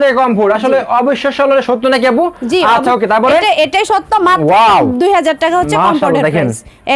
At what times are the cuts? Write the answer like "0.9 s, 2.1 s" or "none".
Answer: none